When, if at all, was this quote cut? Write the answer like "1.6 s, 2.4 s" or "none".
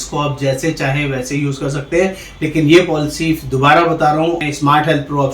4.4 s